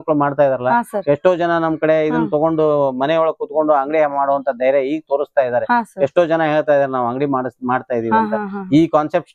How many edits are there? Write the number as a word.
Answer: zero